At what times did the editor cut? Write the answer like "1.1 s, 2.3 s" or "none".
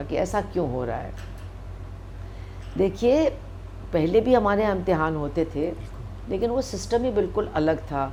none